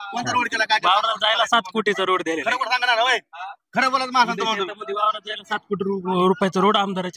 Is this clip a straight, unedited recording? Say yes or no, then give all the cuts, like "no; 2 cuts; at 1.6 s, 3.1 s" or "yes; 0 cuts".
yes; 0 cuts